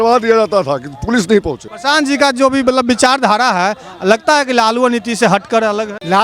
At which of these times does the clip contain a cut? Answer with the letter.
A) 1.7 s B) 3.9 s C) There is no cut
A